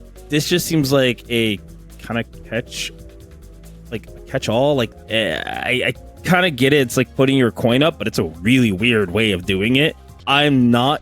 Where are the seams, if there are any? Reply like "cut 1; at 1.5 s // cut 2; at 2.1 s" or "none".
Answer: cut 1; at 4.9 s // cut 2; at 10.1 s

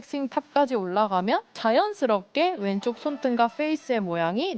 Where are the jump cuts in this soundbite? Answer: cut 1; at 1.5 s

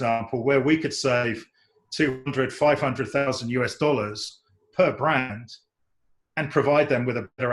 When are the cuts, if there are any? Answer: none

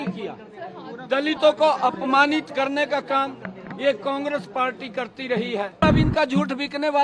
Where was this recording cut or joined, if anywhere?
cut 1; at 6.0 s

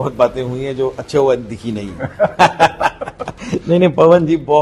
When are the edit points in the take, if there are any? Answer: none

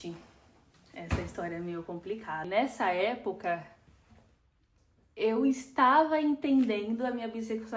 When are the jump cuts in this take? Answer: cut 1; at 2.5 s

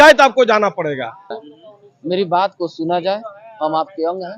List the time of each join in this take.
cut 1; at 1.3 s

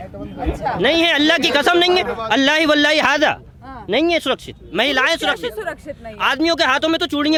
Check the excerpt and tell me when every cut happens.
none

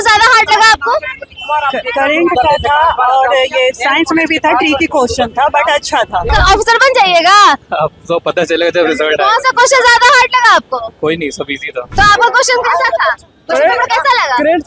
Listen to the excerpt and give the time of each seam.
cut 1; at 6.3 s // cut 2; at 11.8 s

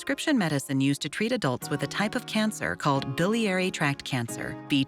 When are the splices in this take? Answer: none

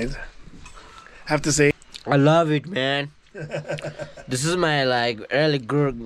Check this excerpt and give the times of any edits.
cut 1; at 1.7 s

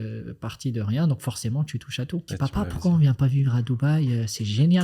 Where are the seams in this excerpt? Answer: cut 1; at 2.3 s

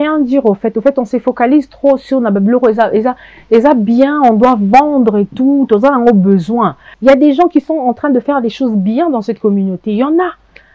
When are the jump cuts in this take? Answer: cut 1; at 6.8 s

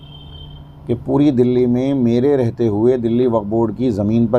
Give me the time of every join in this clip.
none

